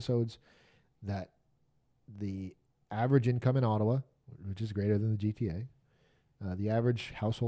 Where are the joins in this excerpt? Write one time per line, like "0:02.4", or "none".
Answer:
none